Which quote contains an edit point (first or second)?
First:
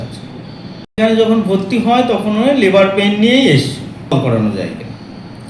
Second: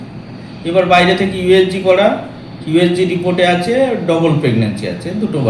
first